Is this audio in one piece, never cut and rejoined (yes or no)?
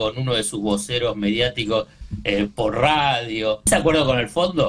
no